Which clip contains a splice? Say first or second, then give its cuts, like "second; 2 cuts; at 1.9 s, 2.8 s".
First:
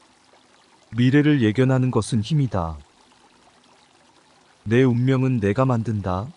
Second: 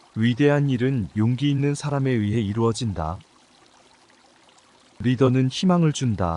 first; 3 cuts; at 0.9 s, 2.8 s, 4.3 s